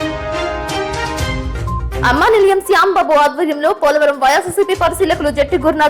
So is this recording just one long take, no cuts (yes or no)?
no